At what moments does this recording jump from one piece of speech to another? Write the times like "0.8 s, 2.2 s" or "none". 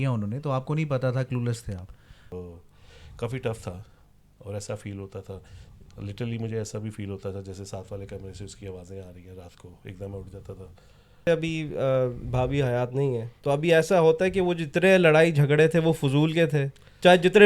2.3 s, 11.3 s